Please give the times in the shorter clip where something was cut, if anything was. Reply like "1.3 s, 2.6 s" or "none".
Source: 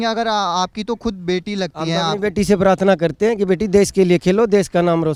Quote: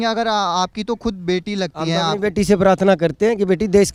none